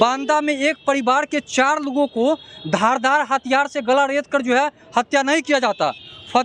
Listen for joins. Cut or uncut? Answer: uncut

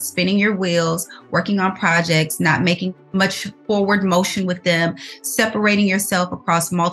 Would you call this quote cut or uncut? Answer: cut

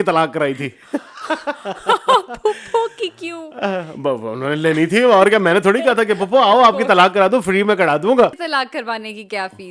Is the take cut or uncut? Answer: cut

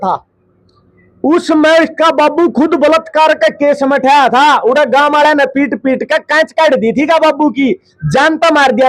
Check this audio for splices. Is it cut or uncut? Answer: uncut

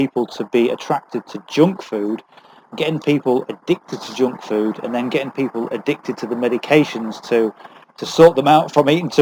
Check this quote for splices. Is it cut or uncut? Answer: uncut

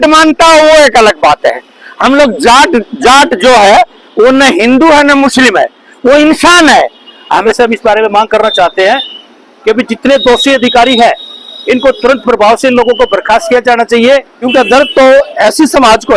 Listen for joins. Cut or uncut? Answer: cut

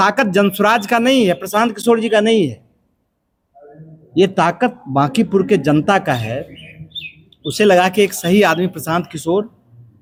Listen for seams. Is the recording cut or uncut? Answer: uncut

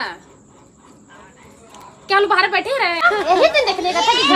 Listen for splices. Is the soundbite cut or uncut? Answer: cut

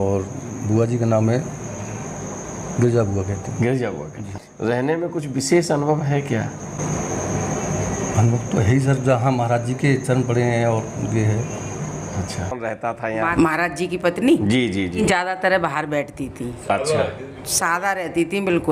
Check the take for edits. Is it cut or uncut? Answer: cut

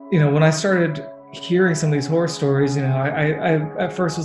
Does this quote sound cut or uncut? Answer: uncut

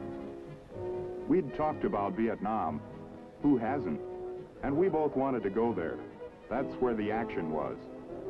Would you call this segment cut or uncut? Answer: uncut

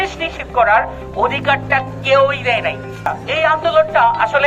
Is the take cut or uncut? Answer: cut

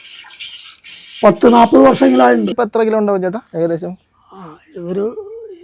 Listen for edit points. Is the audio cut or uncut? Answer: cut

